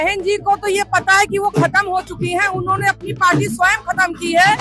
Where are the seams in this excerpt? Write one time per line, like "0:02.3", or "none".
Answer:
none